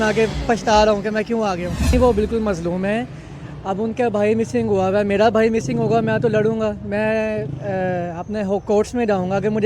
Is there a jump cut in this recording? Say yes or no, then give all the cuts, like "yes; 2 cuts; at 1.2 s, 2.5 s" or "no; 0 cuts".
yes; 1 cut; at 1.9 s